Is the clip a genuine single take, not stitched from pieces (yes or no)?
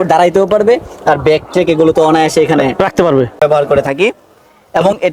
no